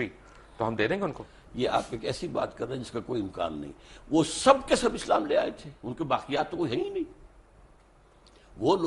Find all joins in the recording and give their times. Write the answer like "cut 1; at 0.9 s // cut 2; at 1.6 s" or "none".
none

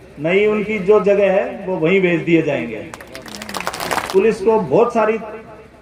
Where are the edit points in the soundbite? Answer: cut 1; at 4.0 s

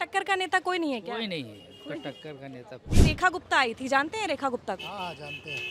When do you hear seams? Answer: cut 1; at 2.9 s

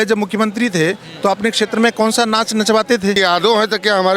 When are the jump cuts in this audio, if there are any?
cut 1; at 3.2 s

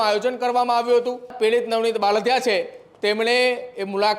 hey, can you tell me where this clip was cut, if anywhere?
cut 1; at 1.3 s

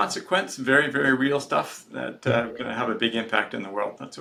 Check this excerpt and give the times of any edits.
none

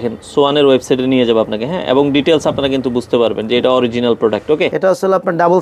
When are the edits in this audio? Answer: cut 1; at 4.7 s

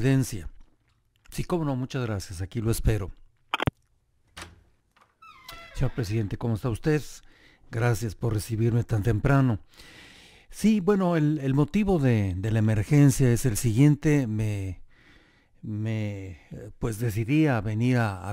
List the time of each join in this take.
cut 1; at 6.4 s

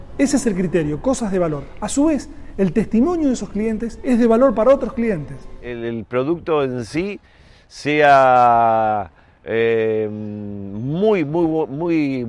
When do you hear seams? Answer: cut 1; at 5.7 s

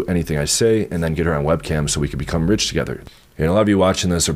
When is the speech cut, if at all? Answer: cut 1; at 3.0 s

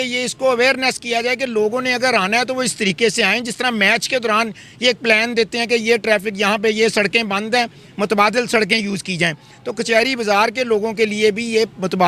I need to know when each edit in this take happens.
none

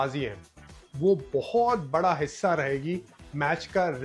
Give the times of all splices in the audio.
none

